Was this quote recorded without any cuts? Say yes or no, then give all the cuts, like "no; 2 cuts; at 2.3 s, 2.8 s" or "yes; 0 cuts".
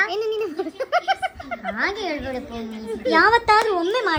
yes; 0 cuts